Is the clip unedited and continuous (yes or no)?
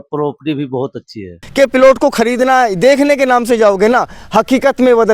no